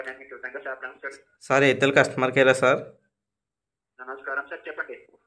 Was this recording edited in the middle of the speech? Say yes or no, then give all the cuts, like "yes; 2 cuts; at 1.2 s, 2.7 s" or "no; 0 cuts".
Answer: no; 0 cuts